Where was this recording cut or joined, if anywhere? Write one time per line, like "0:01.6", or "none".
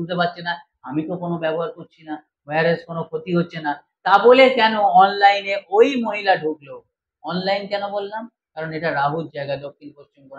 none